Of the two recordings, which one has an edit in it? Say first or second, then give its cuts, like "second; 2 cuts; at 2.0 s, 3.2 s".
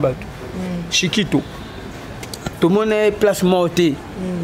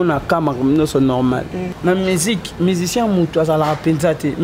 second; 1 cut; at 1.6 s